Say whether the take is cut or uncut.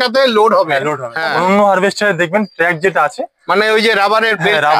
cut